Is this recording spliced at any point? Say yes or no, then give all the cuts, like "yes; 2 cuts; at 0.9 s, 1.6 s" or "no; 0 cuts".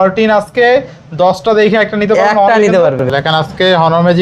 yes; 1 cut; at 3.1 s